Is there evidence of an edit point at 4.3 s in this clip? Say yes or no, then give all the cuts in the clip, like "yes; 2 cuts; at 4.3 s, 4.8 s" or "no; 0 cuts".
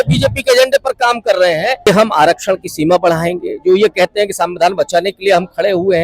no; 1 cut; at 1.9 s